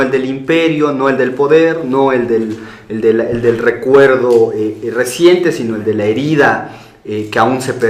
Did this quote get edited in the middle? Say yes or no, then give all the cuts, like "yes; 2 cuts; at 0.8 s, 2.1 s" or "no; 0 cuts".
no; 0 cuts